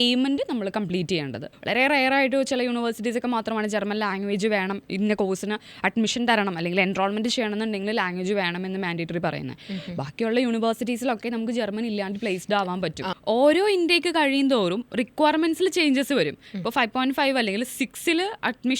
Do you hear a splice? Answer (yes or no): yes